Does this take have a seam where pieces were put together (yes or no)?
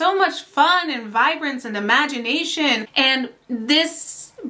yes